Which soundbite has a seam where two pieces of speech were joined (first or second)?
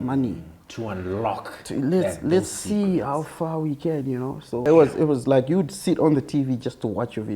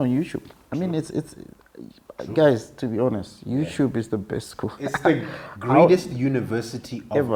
first